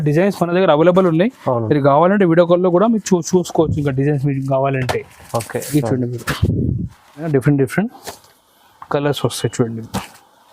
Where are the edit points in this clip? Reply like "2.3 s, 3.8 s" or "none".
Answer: 7.3 s